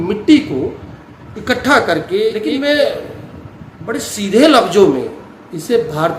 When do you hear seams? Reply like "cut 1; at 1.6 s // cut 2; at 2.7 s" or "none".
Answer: cut 1; at 2.4 s